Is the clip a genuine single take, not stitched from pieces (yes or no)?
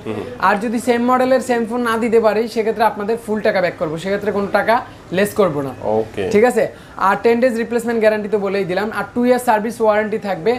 yes